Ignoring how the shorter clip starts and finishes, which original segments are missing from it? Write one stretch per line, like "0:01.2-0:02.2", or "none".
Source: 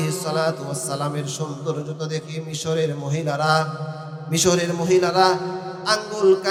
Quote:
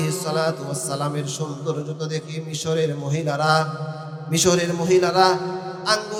none